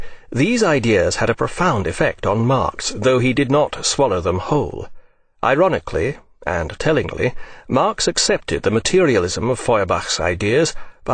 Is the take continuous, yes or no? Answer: no